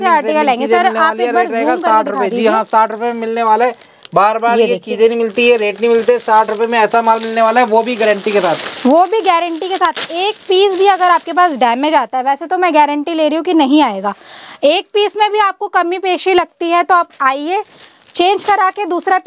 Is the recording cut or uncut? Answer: uncut